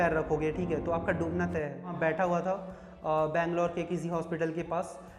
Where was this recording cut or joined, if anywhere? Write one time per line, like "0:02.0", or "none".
0:01.9